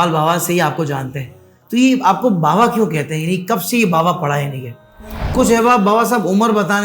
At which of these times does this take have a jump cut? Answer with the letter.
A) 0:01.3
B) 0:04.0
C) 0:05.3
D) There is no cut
C